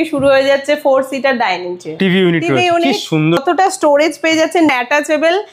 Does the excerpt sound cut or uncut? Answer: cut